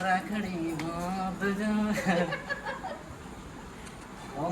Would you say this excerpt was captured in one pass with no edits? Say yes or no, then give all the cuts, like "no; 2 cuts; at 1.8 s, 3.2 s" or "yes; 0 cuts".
yes; 0 cuts